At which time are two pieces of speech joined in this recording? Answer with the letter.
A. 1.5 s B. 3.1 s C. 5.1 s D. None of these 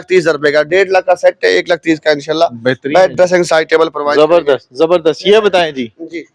D